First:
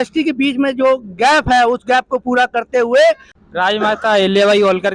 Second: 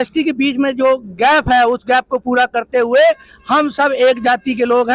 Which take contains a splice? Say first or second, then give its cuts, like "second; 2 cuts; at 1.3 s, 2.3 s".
first; 1 cut; at 3.3 s